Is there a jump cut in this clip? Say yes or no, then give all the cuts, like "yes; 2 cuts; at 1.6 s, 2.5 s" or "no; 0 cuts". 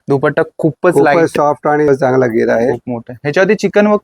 yes; 1 cut; at 1.9 s